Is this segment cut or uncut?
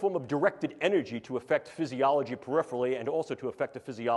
uncut